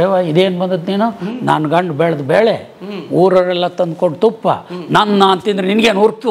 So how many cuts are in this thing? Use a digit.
0